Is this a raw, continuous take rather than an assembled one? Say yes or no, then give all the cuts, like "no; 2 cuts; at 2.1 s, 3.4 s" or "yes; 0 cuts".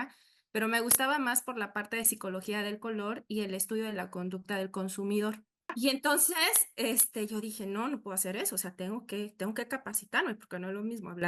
no; 1 cut; at 5.7 s